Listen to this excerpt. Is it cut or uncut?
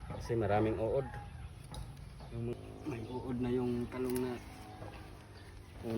cut